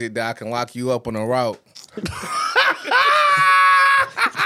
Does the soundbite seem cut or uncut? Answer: uncut